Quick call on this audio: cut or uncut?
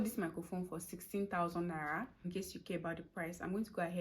cut